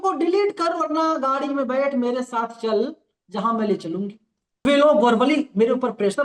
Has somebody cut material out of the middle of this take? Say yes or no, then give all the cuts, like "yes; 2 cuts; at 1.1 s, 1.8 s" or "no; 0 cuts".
yes; 1 cut; at 4.7 s